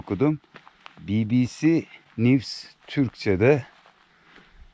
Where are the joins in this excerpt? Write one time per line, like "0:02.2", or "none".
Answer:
0:02.0